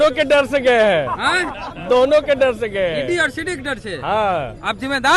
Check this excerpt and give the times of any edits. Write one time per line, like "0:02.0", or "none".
none